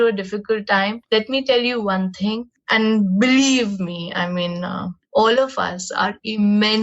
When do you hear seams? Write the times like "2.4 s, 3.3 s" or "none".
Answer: 1.0 s, 4.9 s